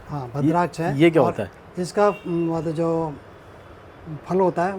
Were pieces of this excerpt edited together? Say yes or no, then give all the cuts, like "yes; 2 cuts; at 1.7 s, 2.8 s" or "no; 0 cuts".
no; 0 cuts